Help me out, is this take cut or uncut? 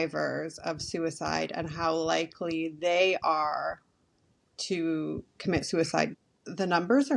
cut